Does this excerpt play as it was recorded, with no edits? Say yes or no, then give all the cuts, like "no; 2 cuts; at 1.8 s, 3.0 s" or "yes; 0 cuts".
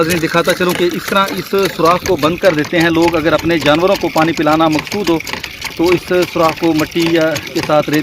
yes; 0 cuts